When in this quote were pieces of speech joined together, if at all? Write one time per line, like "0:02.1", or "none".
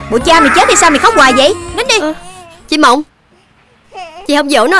0:01.7